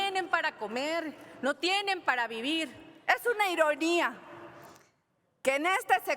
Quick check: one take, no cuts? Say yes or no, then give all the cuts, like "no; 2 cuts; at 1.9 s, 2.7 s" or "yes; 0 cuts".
no; 1 cut; at 2.9 s